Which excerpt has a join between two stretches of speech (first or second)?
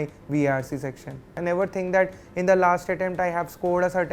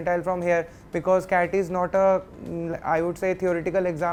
first